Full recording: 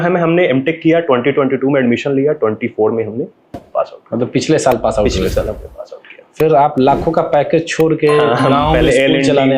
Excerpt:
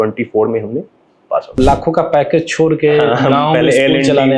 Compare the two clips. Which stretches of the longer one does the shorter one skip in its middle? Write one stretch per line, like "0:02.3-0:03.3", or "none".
0:04.0-0:06.7